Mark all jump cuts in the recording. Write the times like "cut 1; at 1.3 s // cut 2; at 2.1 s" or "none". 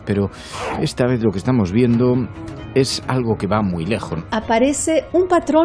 cut 1; at 4.2 s